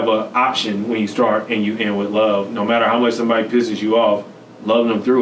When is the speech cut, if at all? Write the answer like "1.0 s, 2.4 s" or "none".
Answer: none